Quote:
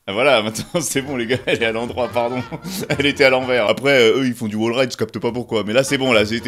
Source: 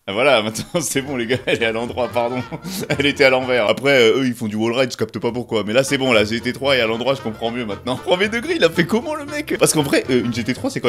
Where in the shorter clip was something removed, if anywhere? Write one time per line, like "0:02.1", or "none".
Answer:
none